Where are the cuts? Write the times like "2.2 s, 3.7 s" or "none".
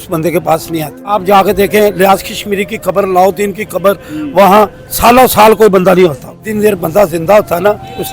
1.1 s, 6.3 s